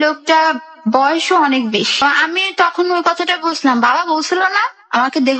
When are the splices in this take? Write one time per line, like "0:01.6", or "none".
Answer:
0:02.0